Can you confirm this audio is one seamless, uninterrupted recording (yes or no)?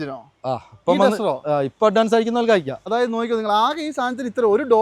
no